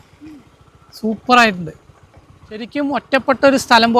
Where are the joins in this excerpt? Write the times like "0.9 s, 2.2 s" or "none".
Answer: 2.7 s